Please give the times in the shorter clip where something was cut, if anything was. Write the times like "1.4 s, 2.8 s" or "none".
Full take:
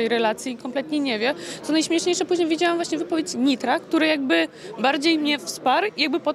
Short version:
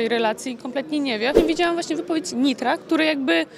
1.4 s